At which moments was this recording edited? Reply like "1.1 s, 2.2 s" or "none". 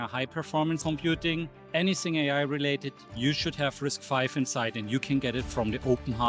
1.0 s